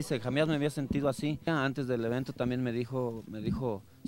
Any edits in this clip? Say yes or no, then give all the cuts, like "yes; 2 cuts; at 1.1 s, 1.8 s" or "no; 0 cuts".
yes; 1 cut; at 1.5 s